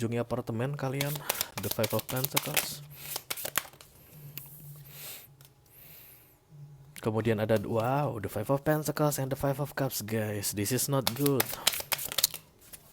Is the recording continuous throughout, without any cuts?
yes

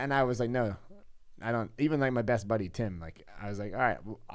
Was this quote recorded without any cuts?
yes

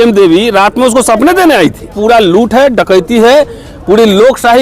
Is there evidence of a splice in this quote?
yes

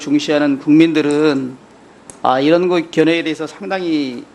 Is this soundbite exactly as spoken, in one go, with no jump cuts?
no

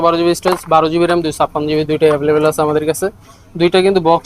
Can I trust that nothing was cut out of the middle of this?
yes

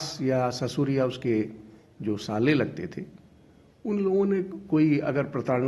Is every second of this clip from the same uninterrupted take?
yes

